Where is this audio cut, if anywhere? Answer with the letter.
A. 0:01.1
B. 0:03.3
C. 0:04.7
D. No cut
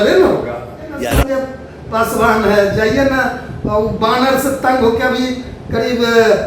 A